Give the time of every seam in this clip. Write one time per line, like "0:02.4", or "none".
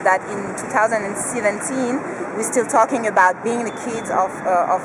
none